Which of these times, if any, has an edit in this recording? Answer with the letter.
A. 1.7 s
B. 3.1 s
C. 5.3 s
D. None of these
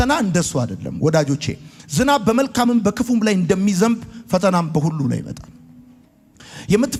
D